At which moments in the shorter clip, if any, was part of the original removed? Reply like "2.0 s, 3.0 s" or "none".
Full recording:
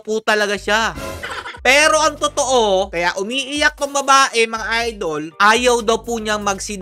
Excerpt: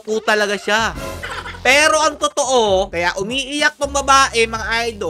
none